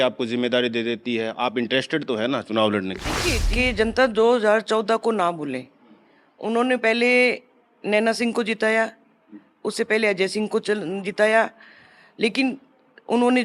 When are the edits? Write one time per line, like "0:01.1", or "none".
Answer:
0:03.4